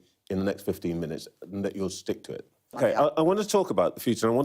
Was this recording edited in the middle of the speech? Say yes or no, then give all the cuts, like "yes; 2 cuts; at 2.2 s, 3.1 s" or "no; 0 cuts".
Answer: yes; 1 cut; at 2.8 s